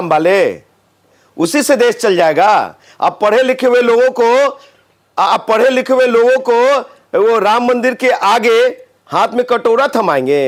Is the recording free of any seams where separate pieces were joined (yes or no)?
yes